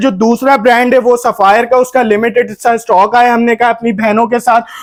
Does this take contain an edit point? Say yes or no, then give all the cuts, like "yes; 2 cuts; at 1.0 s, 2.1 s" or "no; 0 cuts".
no; 0 cuts